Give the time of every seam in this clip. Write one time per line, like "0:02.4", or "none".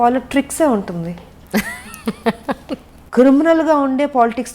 0:03.0